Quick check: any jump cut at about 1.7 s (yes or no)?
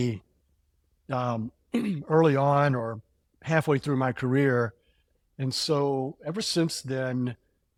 no